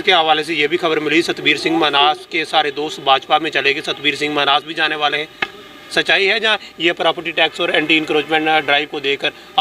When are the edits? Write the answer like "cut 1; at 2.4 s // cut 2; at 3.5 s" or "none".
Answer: none